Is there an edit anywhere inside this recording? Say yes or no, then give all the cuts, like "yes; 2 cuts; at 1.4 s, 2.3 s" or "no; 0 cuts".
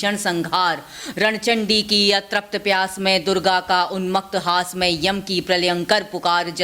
no; 0 cuts